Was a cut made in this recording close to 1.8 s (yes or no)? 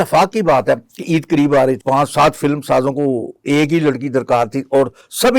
yes